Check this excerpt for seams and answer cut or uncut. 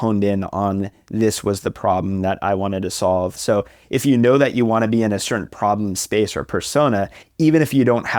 cut